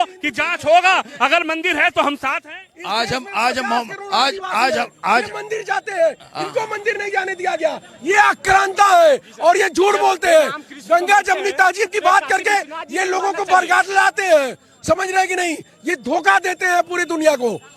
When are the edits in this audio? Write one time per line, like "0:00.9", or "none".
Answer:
none